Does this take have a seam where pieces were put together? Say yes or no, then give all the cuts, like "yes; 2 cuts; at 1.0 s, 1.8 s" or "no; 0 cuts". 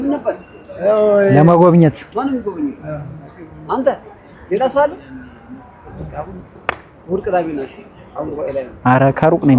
no; 0 cuts